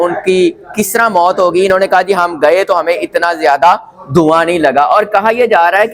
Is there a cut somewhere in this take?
no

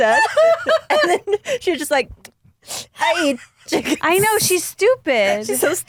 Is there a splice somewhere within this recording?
no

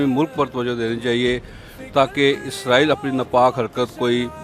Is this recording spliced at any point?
no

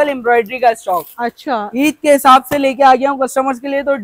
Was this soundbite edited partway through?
no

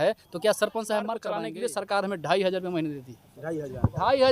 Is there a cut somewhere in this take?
yes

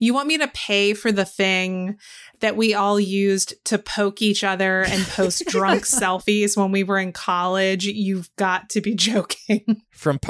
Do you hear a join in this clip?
no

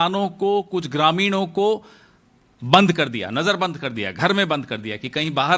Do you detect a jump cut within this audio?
no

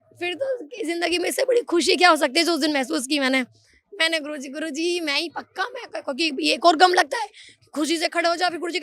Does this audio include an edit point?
no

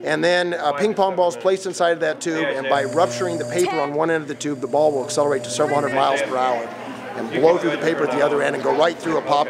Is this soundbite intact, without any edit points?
no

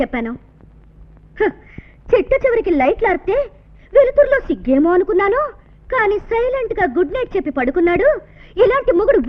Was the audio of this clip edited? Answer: no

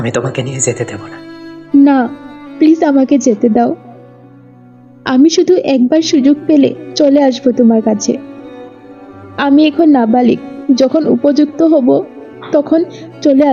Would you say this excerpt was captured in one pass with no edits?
yes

